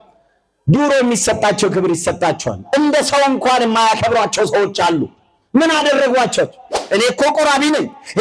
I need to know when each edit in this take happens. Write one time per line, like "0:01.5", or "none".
0:06.7